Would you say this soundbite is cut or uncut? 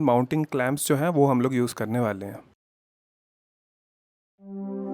uncut